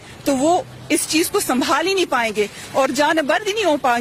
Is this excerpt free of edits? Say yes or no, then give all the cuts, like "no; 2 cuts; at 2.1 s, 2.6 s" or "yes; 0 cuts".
yes; 0 cuts